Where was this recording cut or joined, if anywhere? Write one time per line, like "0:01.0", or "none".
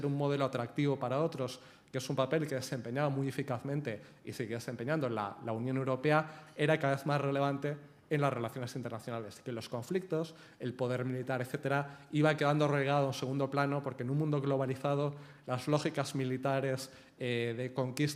0:10.1